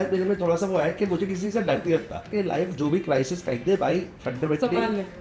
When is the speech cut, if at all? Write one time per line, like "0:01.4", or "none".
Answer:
0:02.3